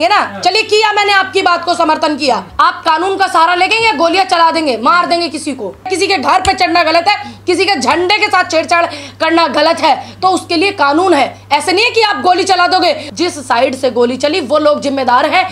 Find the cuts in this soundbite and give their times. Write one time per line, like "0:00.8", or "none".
0:02.5
0:05.9
0:13.1